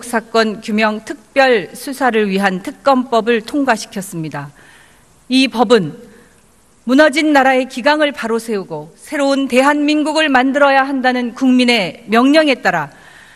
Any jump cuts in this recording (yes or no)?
yes